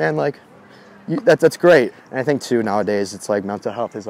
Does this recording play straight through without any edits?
no; 1 cut; at 1.9 s

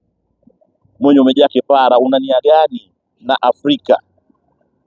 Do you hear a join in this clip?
no; 0 cuts

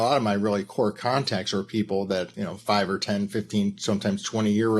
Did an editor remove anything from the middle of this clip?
yes; 1 cut; at 2.3 s

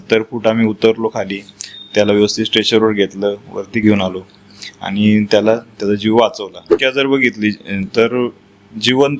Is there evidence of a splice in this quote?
yes; 1 cut; at 6.8 s

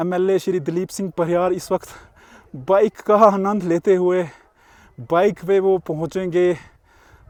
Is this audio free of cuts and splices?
yes; 0 cuts

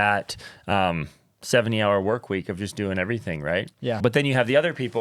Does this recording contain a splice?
yes; 1 cut; at 4.0 s

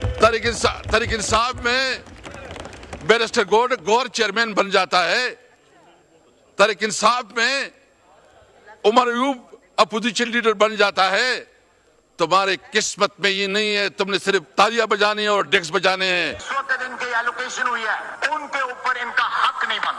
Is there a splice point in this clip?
yes; 1 cut; at 16.4 s

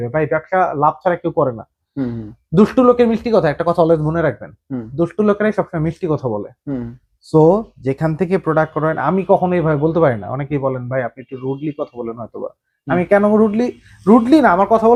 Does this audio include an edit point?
no; 0 cuts

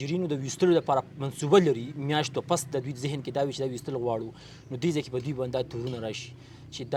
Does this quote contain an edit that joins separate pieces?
no; 0 cuts

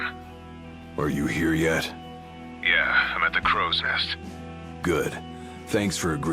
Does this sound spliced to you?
no; 0 cuts

